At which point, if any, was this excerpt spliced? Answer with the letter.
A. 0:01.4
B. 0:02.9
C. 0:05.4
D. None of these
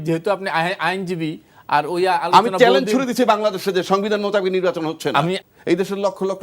C